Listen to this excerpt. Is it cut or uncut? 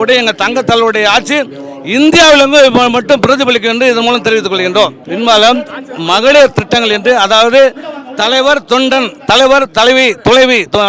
uncut